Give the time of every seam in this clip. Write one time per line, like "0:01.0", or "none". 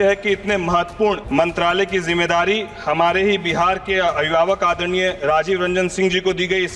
0:01.2